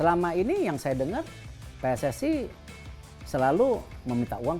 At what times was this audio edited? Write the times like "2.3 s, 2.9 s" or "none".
none